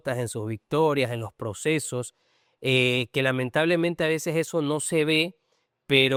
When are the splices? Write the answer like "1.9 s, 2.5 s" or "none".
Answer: none

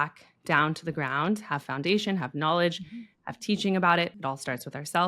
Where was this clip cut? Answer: 4.2 s

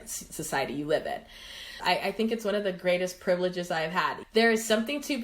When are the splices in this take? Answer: 1.7 s, 4.2 s

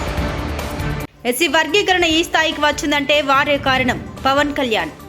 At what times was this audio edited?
1.0 s

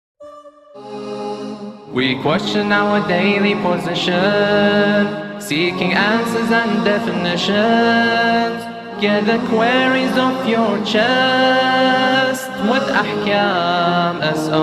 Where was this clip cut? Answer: 0.9 s

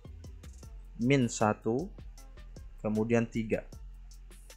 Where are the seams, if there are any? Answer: none

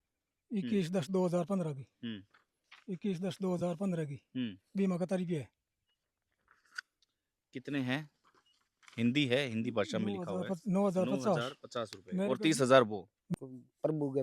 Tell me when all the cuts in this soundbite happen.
13.2 s

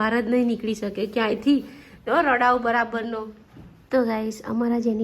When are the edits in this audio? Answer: 3.7 s

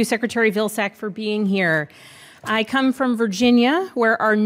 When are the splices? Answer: 2.0 s

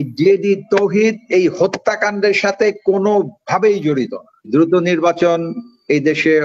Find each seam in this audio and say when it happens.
4.5 s

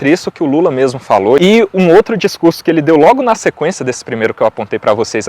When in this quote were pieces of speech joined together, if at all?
1.4 s

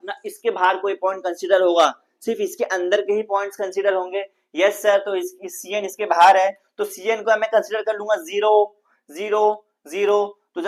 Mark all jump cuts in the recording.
none

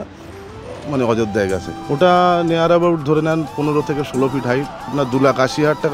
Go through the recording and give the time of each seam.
1.7 s, 4.9 s

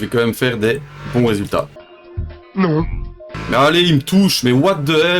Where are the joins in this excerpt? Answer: 3.3 s

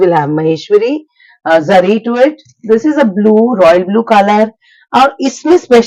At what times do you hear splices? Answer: none

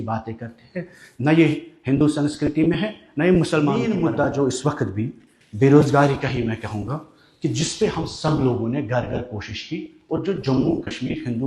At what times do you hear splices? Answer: 3.8 s

